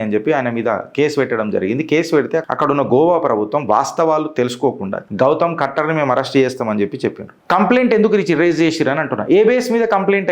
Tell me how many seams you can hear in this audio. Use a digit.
2